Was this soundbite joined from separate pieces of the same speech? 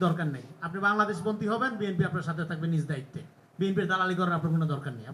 no; 0 cuts

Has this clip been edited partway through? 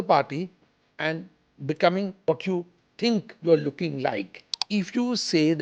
yes; 2 cuts; at 2.2 s, 4.6 s

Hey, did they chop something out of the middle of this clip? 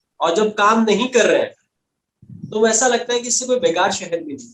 no; 0 cuts

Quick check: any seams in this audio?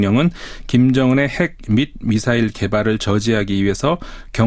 no; 0 cuts

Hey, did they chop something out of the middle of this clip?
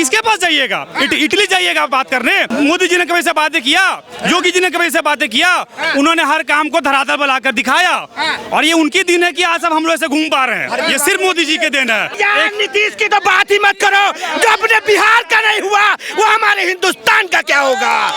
yes; 2 cuts; at 2.5 s, 12.1 s

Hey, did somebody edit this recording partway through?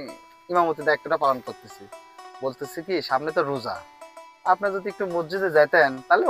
no; 0 cuts

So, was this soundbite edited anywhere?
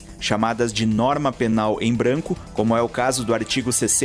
no; 0 cuts

